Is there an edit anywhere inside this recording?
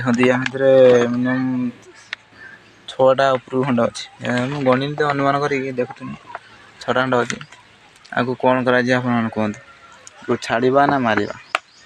no; 0 cuts

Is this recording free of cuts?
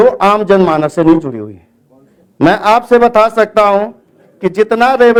yes; 0 cuts

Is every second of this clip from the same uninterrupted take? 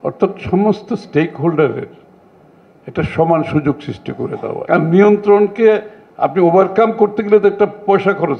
no; 1 cut; at 4.5 s

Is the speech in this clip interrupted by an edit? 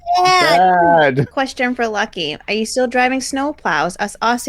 no; 0 cuts

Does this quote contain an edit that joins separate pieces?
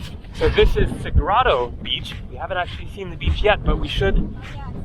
no; 0 cuts

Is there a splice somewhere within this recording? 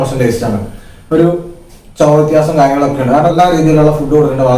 yes; 1 cut; at 3.3 s

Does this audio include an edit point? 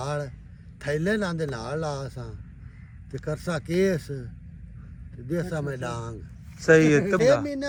no; 0 cuts

